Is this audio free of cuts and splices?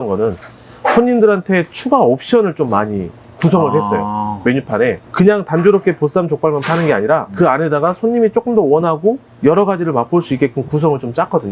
yes; 0 cuts

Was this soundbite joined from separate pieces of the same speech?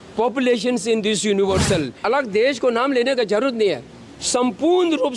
yes; 1 cut; at 2.0 s

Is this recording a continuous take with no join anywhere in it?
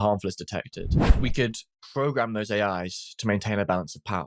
no; 1 cut; at 1.0 s

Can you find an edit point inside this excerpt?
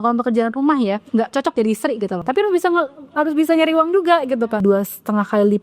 yes; 3 cuts; at 1.0 s, 2.2 s, 4.6 s

